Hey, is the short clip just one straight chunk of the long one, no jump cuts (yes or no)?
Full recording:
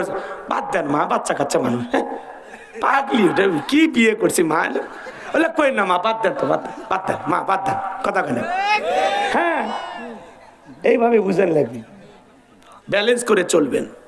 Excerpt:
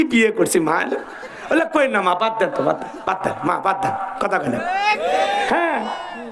yes